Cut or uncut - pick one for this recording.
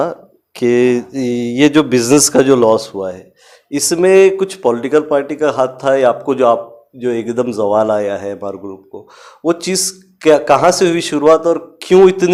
uncut